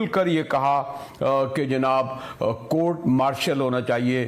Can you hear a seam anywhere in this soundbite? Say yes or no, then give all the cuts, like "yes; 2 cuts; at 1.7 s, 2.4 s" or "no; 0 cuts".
no; 0 cuts